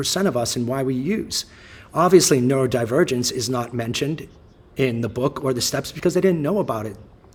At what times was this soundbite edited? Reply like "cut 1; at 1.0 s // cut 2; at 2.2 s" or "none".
none